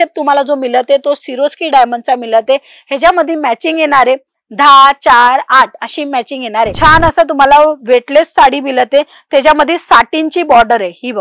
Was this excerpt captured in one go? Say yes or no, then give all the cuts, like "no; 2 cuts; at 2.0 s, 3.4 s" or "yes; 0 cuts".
no; 1 cut; at 6.7 s